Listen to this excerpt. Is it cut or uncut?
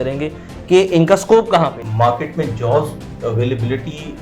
cut